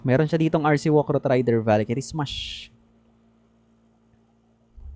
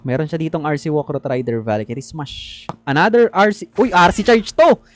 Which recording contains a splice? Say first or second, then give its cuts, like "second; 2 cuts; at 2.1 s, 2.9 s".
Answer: second; 1 cut; at 2.8 s